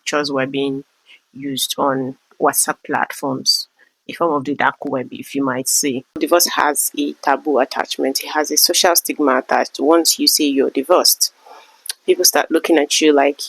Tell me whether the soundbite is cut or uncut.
cut